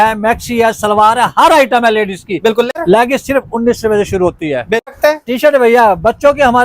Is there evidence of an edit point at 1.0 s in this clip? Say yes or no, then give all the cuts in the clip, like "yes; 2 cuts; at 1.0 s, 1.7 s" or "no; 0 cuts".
no; 2 cuts; at 2.7 s, 4.9 s